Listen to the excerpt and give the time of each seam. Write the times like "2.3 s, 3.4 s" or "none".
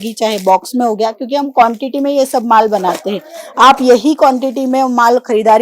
none